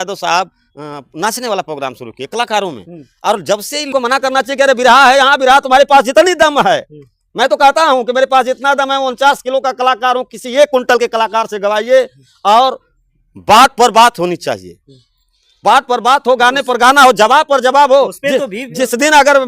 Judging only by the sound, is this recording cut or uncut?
cut